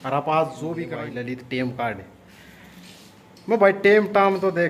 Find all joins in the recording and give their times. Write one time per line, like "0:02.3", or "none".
0:00.9